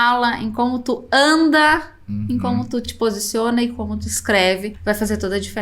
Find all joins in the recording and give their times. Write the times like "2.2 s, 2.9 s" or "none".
4.7 s